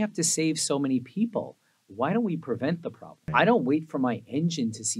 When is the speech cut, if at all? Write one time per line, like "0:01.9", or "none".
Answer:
0:03.1